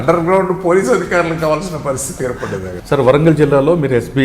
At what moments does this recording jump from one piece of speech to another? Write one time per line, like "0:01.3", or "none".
0:02.8